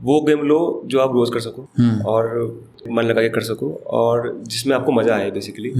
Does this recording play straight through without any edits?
no; 2 cuts; at 1.6 s, 2.8 s

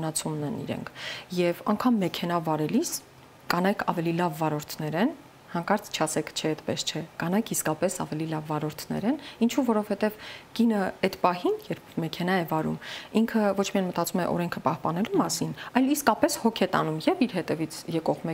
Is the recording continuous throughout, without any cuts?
yes; 0 cuts

